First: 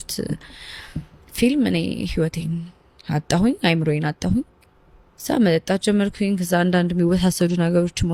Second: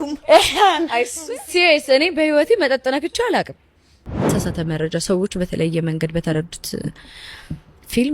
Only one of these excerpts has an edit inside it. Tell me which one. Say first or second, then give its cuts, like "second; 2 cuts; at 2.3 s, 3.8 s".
second; 1 cut; at 4.3 s